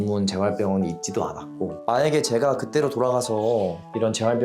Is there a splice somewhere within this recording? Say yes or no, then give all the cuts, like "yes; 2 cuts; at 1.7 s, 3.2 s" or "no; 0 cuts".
yes; 1 cut; at 1.8 s